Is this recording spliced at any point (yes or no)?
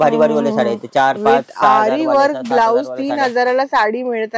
no